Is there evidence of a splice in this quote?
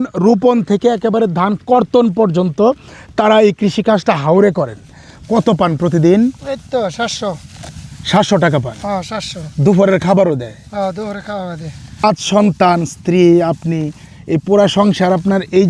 yes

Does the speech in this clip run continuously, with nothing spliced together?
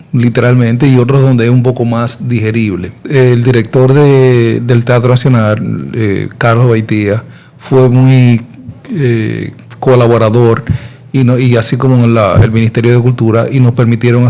no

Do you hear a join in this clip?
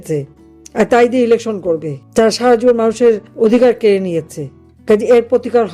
yes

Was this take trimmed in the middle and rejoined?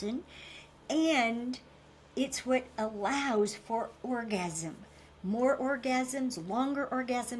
no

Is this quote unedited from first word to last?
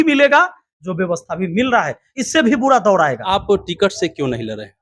no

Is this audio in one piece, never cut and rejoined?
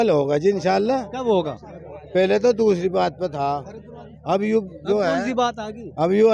yes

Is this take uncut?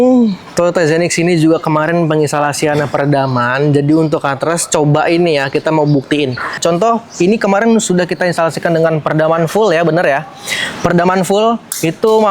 no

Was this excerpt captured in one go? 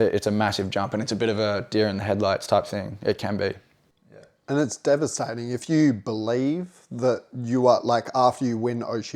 yes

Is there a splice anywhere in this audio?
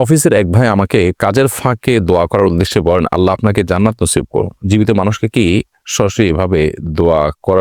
no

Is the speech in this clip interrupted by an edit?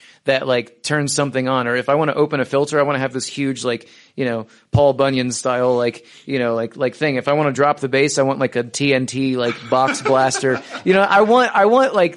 no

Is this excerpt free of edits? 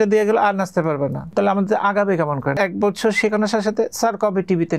no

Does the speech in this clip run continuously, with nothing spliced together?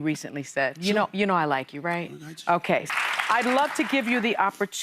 no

